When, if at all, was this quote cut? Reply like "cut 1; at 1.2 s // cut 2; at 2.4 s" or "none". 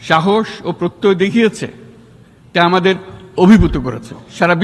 none